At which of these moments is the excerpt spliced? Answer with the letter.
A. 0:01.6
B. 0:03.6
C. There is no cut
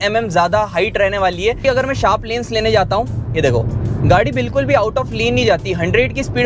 A